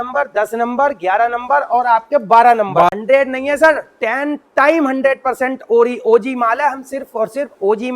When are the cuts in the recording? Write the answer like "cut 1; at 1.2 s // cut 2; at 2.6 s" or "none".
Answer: cut 1; at 2.9 s